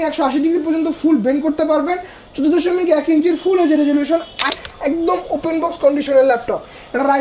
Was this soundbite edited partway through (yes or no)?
yes